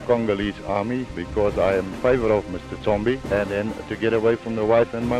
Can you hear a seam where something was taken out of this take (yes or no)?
yes